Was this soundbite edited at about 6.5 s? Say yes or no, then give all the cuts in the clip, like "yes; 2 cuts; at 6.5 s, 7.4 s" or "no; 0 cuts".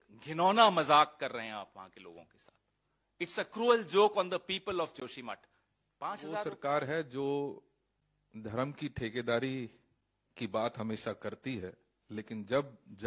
yes; 1 cut; at 6.5 s